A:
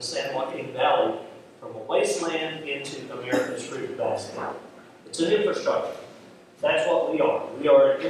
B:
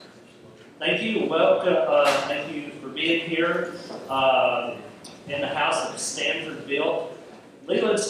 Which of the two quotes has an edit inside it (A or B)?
A